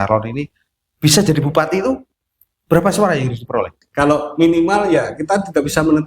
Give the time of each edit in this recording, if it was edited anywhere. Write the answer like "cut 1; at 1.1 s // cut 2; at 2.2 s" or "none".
cut 1; at 3.8 s